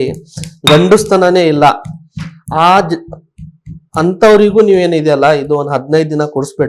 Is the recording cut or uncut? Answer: uncut